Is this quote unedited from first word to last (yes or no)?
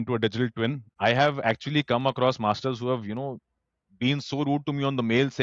no